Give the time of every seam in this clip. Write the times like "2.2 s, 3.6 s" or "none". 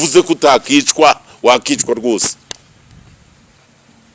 none